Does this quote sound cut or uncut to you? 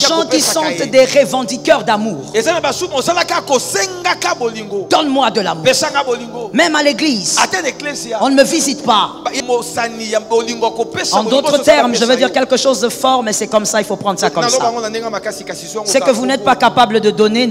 cut